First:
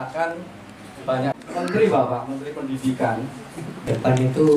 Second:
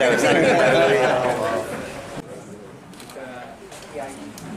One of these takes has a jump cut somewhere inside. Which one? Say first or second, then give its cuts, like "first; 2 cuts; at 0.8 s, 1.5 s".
first; 2 cuts; at 1.4 s, 3.9 s